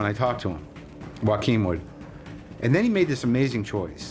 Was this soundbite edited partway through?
no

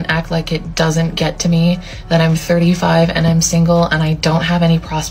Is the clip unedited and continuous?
yes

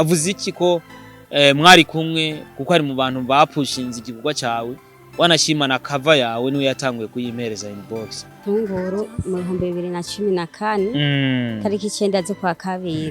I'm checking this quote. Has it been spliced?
yes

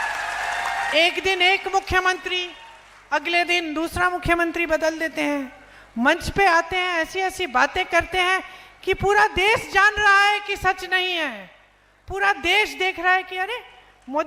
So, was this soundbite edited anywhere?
no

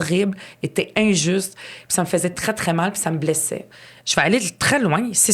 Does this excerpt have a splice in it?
yes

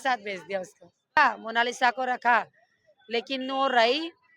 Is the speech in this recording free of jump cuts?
no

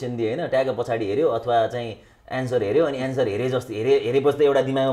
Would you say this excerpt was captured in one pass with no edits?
yes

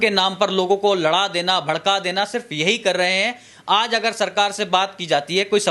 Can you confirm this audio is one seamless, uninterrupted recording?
yes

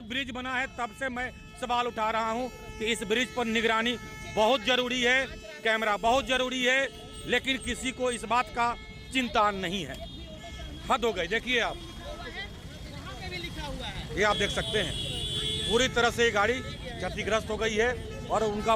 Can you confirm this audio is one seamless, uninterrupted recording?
yes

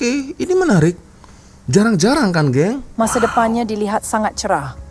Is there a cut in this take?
yes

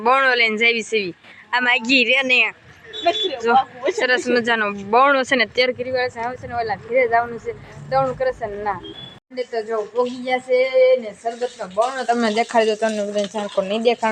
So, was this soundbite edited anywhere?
no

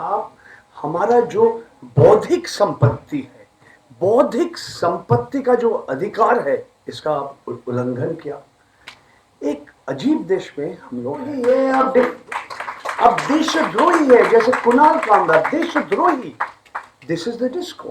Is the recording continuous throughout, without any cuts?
no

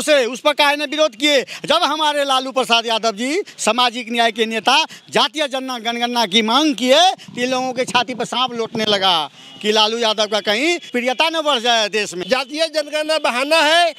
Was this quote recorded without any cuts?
no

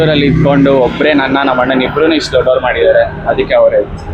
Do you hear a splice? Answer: no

